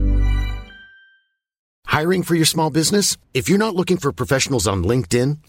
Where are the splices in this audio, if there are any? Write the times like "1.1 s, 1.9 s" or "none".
1.8 s